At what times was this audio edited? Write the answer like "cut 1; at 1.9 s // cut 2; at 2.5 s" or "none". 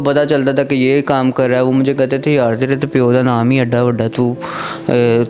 none